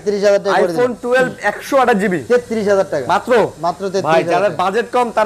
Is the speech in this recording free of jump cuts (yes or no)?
yes